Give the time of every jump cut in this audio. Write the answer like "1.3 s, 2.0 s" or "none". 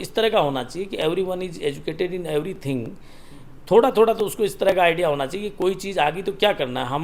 none